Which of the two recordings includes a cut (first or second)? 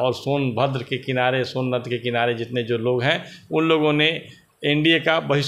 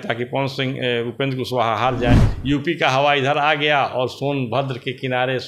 second